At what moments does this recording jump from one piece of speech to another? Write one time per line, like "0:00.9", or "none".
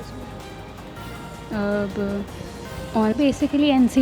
0:03.1